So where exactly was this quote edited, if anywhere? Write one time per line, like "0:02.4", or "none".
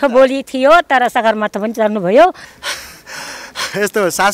0:02.4

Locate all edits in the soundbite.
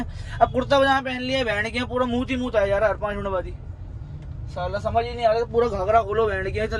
none

